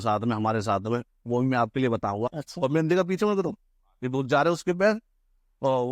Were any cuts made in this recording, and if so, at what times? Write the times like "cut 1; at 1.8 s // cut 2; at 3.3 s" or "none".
cut 1; at 2.4 s